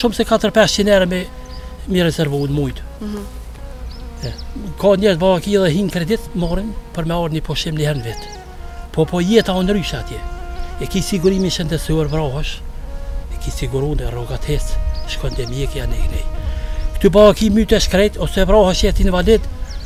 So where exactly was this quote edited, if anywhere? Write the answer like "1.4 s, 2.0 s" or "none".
none

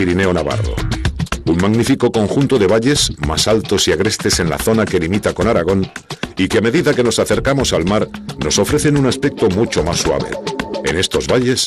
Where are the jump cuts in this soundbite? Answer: 4.9 s

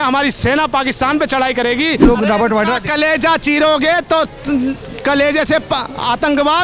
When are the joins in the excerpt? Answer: 2.1 s

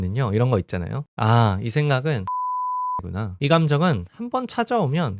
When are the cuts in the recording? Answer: 2.7 s

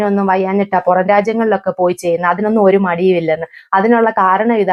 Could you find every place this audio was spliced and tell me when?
none

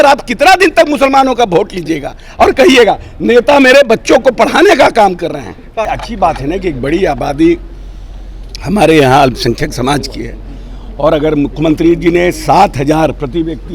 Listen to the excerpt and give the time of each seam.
5.9 s

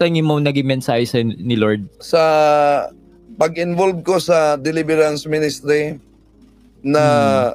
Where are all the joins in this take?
1.9 s

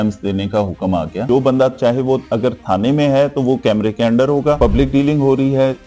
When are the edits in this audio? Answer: 1.2 s, 4.6 s

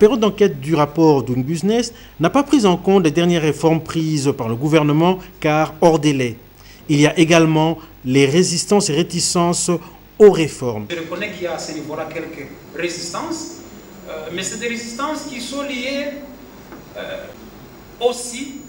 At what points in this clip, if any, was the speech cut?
17.4 s

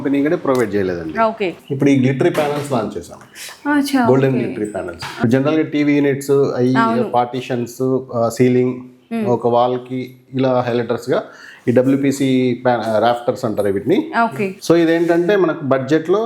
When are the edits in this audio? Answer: 1.6 s, 5.1 s, 14.5 s

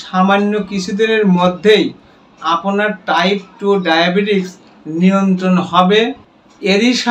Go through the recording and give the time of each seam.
none

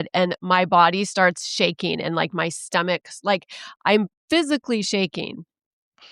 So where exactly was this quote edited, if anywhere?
none

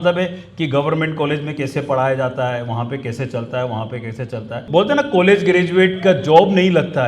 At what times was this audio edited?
4.6 s

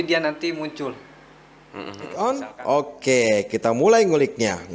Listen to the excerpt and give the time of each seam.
1.7 s

